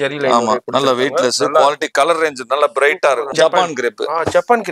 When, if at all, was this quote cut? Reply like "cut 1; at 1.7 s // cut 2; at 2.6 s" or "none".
cut 1; at 3.3 s